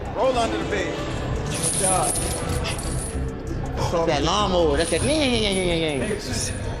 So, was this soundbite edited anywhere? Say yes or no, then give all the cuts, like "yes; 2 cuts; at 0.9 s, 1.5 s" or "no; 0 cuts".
no; 0 cuts